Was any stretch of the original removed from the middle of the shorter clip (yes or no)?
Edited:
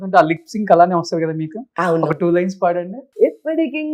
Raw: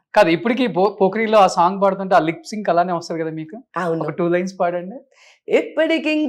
yes